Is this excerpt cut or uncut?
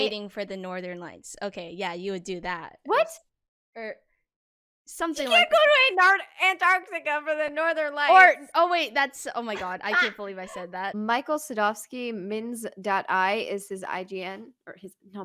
cut